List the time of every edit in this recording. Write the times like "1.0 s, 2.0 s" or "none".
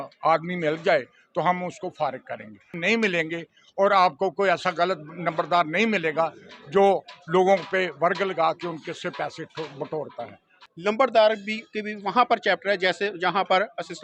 2.8 s, 10.6 s